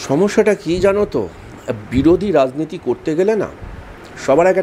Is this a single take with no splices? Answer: yes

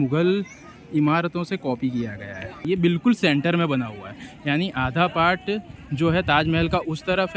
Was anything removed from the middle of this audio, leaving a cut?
yes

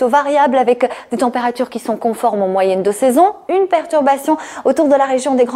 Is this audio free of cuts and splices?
no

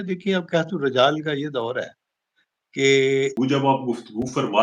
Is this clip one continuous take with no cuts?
no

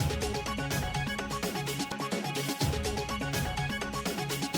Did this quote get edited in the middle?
yes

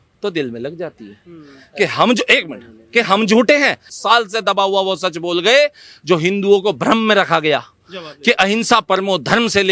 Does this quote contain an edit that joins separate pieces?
yes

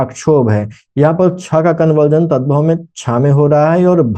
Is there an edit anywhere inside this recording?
no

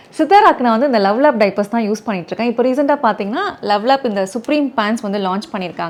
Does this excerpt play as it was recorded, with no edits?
yes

